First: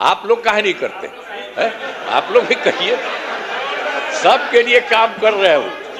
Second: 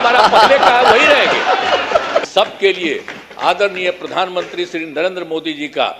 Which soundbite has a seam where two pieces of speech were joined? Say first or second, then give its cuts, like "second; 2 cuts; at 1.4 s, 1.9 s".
second; 1 cut; at 2.3 s